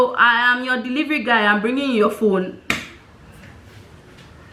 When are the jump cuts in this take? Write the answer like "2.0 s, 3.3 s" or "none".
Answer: none